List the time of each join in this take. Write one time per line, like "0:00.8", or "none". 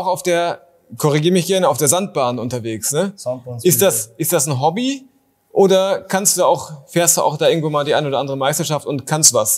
none